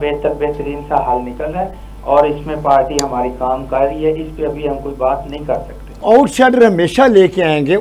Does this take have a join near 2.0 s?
no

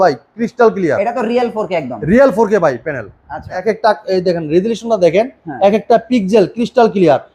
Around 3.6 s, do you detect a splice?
yes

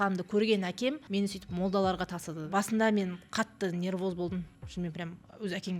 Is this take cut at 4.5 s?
no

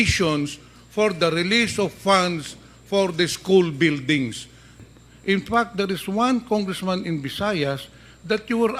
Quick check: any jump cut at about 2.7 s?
no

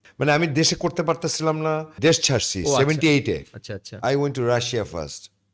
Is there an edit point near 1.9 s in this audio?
yes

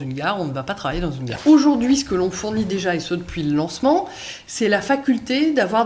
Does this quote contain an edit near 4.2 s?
no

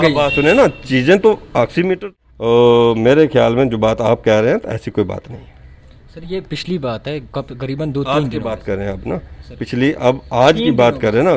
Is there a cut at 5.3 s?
no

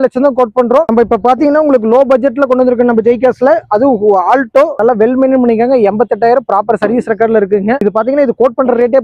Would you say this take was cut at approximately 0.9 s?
yes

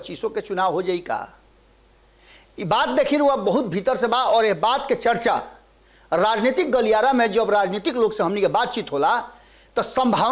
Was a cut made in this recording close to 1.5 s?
no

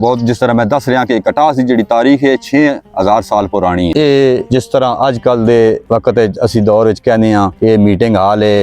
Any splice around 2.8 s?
no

